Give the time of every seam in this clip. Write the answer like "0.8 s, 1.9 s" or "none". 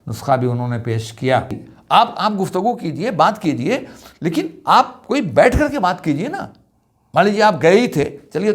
1.7 s